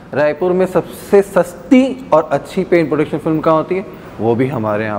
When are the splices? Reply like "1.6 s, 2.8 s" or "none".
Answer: none